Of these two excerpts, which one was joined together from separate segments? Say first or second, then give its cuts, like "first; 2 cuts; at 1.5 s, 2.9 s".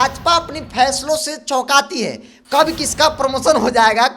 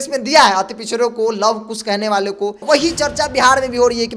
second; 1 cut; at 2.6 s